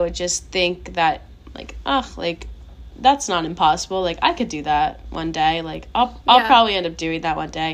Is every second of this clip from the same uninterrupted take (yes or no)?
yes